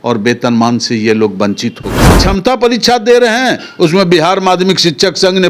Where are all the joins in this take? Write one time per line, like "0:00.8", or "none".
0:02.2